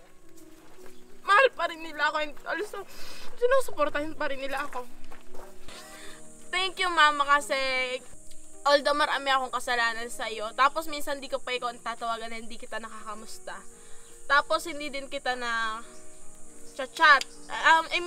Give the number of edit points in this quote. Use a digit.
2